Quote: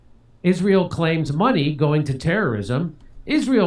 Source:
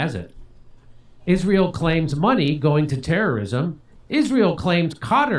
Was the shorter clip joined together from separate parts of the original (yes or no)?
no